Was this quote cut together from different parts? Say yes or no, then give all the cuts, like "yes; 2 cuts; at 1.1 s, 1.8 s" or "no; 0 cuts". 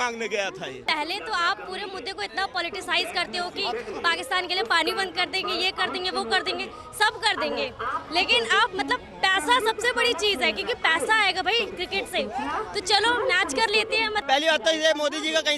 yes; 2 cuts; at 0.8 s, 14.2 s